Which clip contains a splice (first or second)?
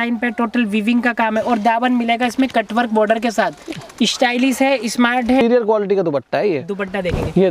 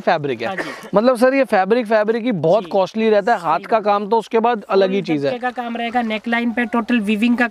first